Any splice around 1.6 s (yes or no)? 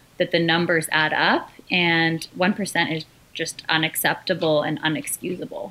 no